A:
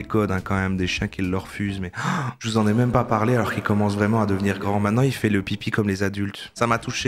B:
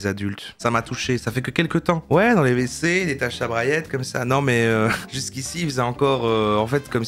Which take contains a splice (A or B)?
B